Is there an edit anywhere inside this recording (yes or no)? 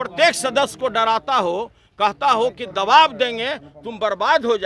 no